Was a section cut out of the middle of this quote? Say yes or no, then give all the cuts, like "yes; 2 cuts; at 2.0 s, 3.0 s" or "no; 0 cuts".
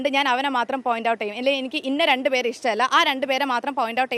no; 0 cuts